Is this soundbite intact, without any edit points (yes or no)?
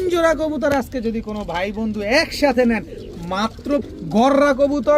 no